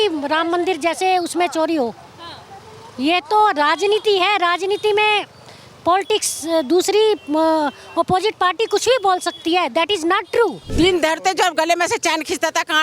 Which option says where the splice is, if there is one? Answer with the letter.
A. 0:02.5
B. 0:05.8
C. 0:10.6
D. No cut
C